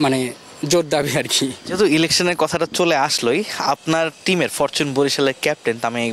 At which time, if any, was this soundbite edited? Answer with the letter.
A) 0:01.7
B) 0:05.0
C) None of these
C